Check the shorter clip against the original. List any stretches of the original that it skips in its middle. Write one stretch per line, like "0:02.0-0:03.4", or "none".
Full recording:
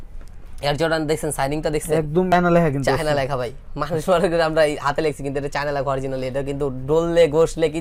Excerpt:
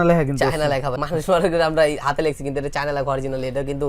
0:03.4-0:03.8